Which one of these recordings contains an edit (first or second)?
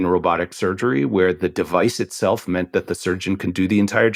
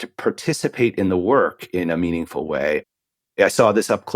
second